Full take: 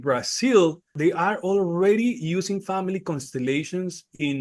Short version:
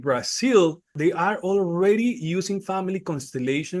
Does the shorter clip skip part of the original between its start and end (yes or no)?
no